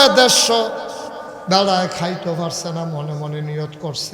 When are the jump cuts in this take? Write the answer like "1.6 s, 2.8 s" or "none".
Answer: none